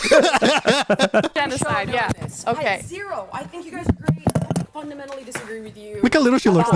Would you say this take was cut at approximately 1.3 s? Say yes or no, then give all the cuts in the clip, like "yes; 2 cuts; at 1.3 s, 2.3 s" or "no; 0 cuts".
yes; 1 cut; at 1.3 s